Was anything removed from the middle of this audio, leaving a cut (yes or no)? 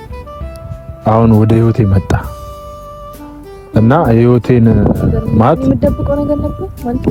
no